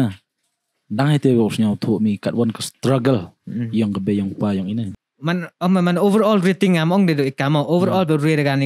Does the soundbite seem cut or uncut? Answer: cut